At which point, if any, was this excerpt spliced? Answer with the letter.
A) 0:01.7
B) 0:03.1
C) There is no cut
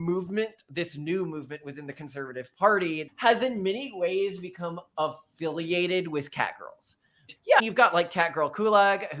B